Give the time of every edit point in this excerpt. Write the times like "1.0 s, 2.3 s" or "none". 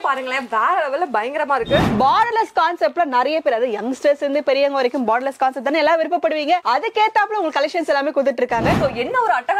1.9 s, 8.8 s